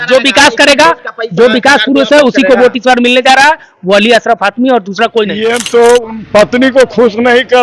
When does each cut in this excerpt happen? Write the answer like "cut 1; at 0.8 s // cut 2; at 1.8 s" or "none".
cut 1; at 5.4 s